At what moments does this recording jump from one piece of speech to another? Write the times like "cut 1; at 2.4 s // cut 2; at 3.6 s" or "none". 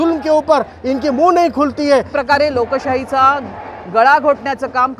cut 1; at 2.1 s